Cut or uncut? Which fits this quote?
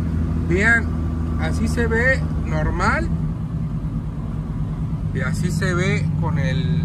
uncut